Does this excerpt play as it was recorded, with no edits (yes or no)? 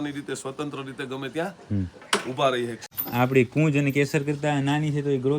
no